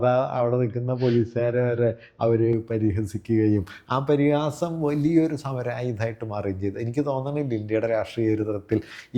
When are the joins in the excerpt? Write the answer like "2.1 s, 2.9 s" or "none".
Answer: none

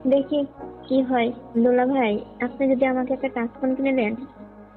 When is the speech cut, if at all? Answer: 1.4 s

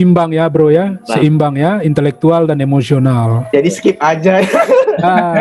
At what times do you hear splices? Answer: none

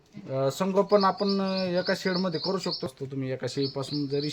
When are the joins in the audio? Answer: 2.9 s

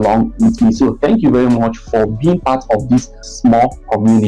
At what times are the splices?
3.3 s

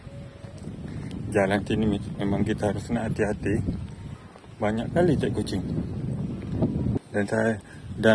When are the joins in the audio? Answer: 7.0 s

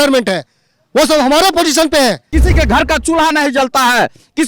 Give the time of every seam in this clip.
2.3 s

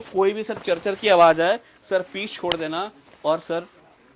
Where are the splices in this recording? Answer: none

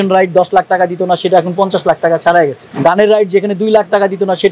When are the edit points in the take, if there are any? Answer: 2.6 s

